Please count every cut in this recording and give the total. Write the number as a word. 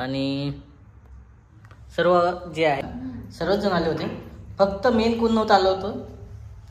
one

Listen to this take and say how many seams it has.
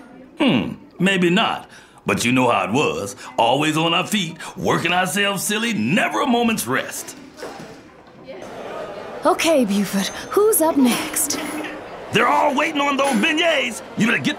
one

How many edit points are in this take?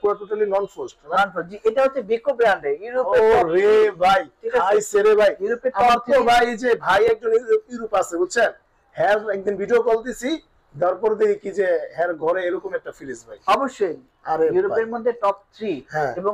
zero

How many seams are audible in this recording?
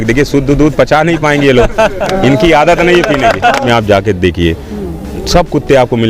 one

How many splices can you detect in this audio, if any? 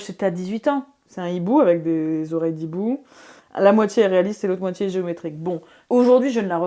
two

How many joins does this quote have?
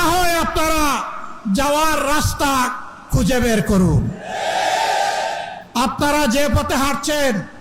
one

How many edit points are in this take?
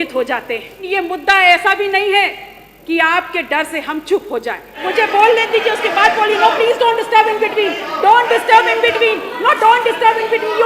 two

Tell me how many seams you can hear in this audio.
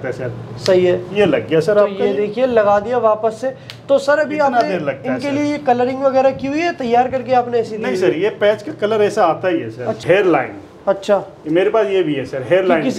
one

